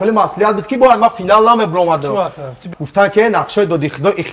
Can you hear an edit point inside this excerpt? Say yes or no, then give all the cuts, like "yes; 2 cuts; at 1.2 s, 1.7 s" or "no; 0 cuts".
yes; 1 cut; at 2.7 s